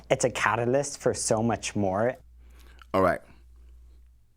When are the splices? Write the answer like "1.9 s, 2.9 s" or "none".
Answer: none